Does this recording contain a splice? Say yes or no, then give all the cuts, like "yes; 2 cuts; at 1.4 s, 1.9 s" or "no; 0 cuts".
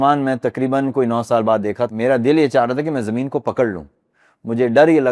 yes; 1 cut; at 1.9 s